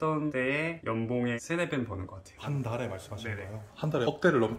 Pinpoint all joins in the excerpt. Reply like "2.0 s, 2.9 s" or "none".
3.7 s